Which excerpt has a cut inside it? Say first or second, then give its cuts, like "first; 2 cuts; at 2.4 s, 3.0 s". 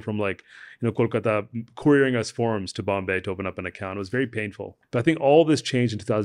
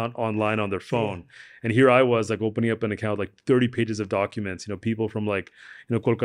first; 1 cut; at 4.7 s